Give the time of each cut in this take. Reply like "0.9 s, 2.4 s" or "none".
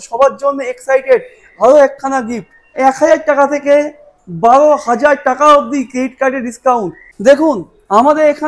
2.7 s, 7.0 s